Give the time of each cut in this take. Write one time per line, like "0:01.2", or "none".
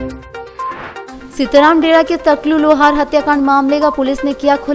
0:01.1